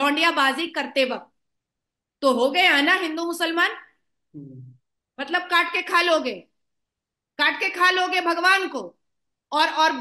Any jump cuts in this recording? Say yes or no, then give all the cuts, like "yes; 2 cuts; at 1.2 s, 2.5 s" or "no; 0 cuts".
no; 0 cuts